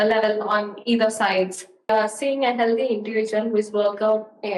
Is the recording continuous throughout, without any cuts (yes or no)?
no